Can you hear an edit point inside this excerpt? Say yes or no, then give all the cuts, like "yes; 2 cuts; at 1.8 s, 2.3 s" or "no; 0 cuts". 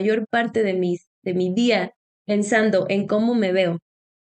no; 0 cuts